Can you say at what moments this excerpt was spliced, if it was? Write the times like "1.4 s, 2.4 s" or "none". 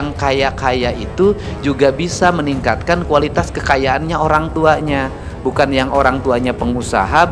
none